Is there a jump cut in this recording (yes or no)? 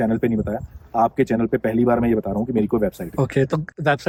no